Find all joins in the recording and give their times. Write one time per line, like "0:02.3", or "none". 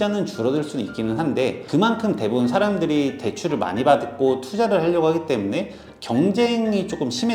none